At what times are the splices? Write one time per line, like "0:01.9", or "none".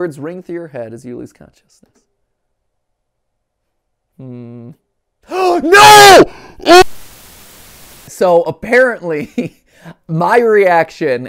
0:08.1